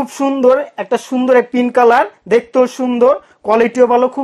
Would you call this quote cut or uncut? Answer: uncut